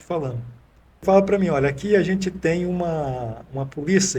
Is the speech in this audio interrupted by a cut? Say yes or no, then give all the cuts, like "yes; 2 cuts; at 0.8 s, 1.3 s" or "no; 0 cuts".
yes; 1 cut; at 1.0 s